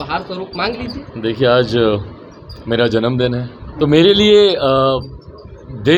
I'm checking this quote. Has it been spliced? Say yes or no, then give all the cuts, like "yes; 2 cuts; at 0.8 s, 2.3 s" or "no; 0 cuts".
yes; 1 cut; at 3.6 s